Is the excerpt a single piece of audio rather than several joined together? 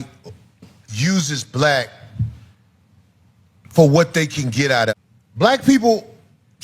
no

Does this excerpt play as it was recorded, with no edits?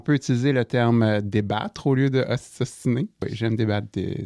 no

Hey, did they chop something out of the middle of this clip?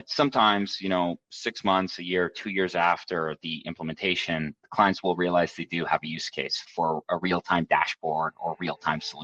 yes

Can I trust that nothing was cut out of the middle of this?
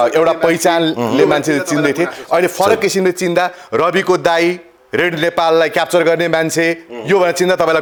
yes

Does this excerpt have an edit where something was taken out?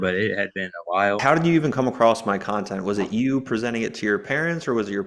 yes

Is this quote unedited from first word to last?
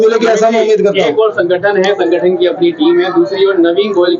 yes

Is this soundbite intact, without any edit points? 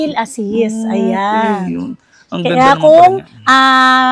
yes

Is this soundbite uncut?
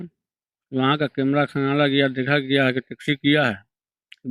yes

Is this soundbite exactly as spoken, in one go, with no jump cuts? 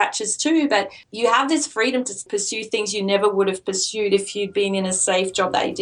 no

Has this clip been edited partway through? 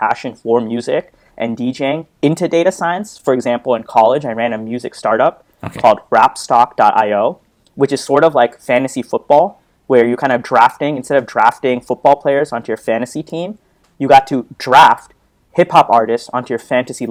no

